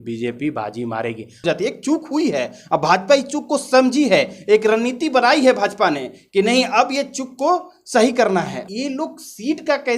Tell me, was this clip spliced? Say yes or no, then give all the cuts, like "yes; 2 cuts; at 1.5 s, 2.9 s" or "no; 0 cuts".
yes; 2 cuts; at 1.4 s, 8.6 s